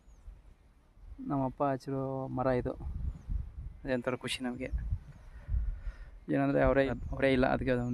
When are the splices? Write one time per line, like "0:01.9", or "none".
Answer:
0:06.9